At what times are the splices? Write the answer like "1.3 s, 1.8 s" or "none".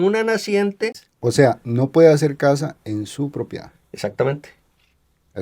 1.1 s